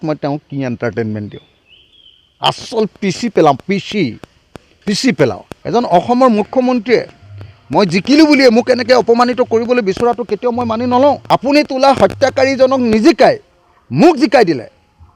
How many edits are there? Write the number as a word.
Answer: two